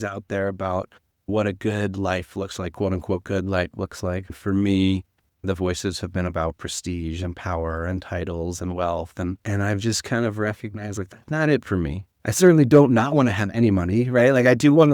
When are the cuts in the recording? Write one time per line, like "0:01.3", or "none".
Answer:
0:04.3
0:09.4